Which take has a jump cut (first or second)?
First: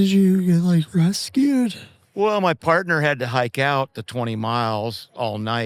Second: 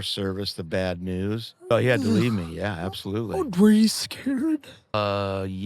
second